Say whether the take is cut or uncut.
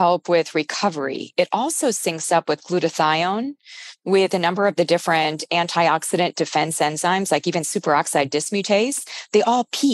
uncut